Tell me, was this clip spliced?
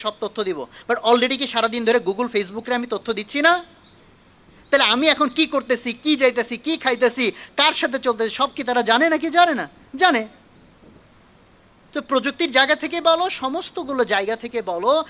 no; 0 cuts

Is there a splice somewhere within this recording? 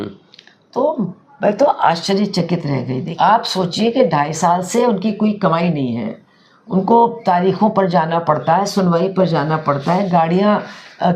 yes; 1 cut; at 3.0 s

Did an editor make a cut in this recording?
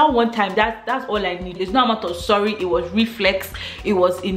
no; 0 cuts

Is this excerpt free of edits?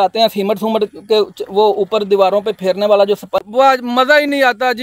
no; 1 cut; at 3.5 s

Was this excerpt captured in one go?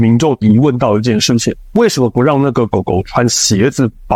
yes; 0 cuts

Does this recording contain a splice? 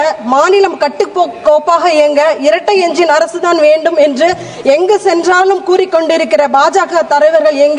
no; 0 cuts

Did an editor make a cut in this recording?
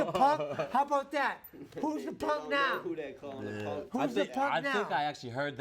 no; 0 cuts

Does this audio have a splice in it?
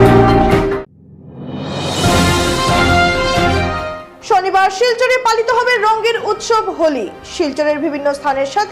no; 0 cuts

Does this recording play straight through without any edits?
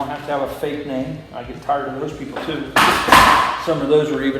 yes; 0 cuts

